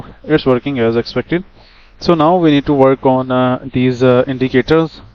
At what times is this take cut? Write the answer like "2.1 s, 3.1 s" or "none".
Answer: none